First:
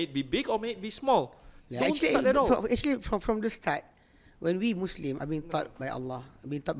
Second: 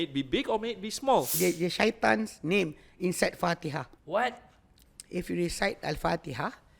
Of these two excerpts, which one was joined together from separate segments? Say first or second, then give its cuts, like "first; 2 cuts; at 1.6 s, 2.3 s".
second; 2 cuts; at 1.4 s, 4.7 s